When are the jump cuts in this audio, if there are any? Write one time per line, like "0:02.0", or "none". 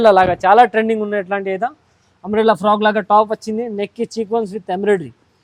none